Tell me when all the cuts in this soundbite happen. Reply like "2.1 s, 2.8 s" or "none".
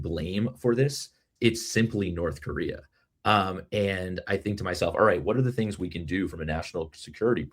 1.2 s